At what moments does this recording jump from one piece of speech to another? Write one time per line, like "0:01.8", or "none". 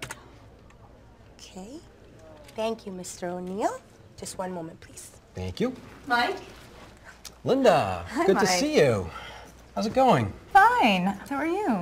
0:09.2
0:10.6

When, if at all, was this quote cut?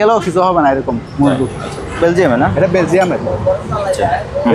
0:02.0

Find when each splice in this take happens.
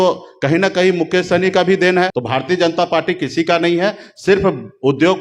0:02.2

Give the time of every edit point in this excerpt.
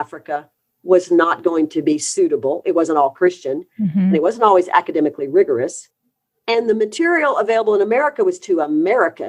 none

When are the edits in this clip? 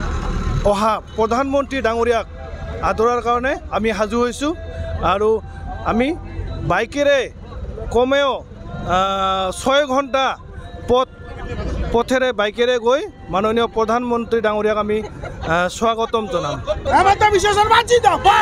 0:16.9

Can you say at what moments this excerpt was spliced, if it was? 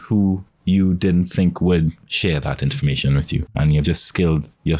0:02.1
0:03.8

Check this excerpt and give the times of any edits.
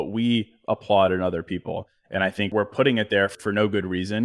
0:02.5
0:03.3

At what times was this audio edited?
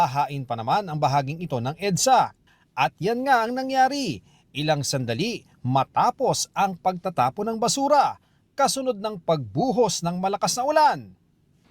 none

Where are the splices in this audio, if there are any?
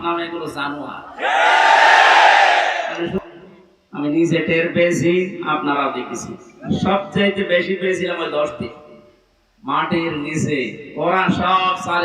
0:03.2

